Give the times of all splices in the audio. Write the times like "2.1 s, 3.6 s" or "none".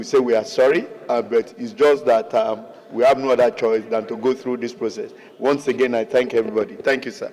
none